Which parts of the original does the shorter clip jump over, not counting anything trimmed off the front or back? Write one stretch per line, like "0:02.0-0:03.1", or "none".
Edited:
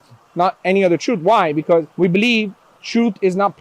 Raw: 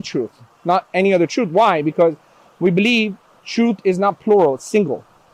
0:02.2-0:02.5